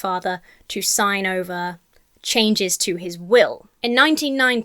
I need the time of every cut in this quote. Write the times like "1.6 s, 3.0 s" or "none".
none